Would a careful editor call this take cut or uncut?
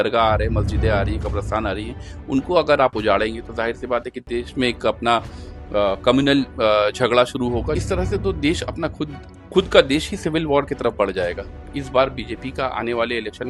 cut